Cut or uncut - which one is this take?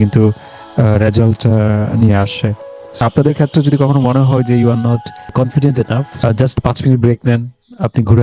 cut